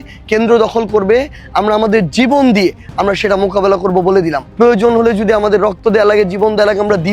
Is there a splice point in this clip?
yes; 1 cut; at 4.4 s

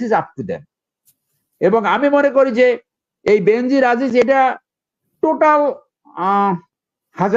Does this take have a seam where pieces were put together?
no; 0 cuts

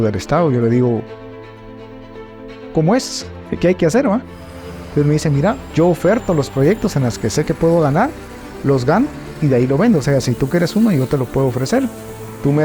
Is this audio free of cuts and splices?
no; 1 cut; at 5.5 s

